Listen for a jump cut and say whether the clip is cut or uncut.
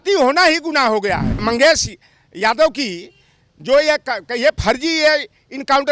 cut